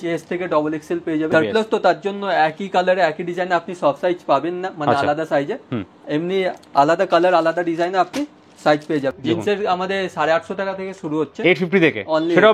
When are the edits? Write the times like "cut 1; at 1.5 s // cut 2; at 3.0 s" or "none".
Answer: cut 1; at 1.3 s // cut 2; at 9.2 s